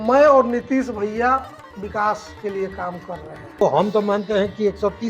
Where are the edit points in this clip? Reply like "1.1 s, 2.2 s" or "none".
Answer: 3.6 s